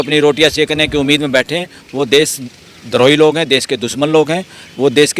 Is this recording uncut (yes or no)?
no